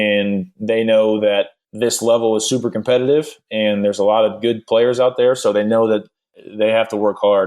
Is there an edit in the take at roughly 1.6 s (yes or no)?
yes